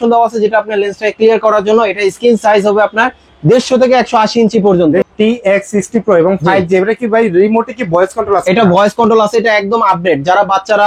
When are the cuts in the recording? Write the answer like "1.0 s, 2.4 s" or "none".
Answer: 5.1 s